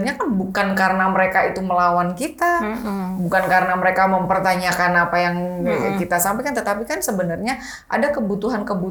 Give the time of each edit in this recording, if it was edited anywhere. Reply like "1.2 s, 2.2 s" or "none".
none

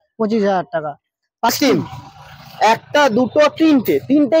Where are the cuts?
1.5 s

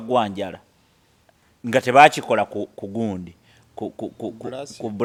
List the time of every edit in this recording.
none

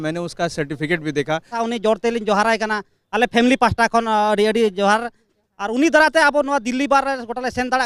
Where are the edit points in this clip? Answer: 1.6 s

